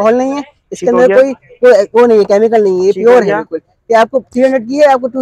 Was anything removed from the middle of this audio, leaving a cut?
no; 0 cuts

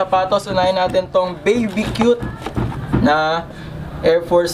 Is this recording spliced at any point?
no; 0 cuts

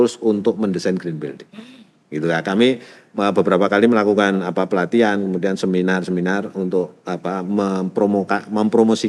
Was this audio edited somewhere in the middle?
no; 0 cuts

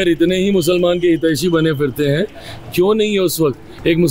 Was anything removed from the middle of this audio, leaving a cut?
no; 0 cuts

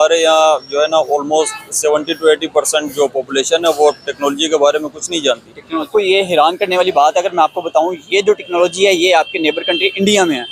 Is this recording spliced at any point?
yes; 1 cut; at 5.9 s

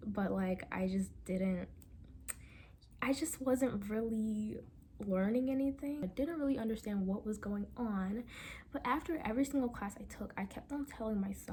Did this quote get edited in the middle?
no; 0 cuts

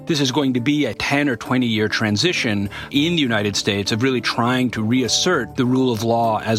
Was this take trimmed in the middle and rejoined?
yes; 3 cuts; at 1.0 s, 2.9 s, 5.5 s

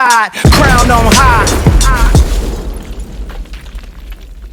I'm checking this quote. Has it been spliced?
no; 0 cuts

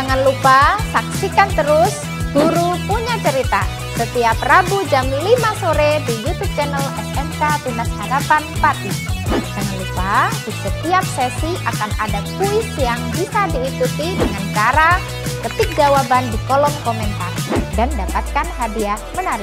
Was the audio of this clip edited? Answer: no; 0 cuts

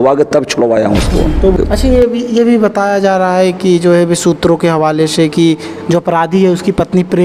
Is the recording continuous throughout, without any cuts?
no; 1 cut; at 1.5 s

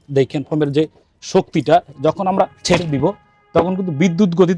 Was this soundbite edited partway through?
no; 0 cuts

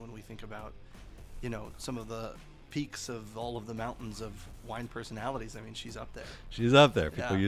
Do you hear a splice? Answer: no; 0 cuts

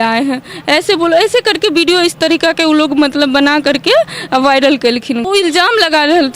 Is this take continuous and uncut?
no; 1 cut; at 5.2 s

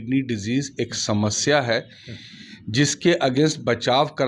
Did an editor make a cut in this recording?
no; 0 cuts

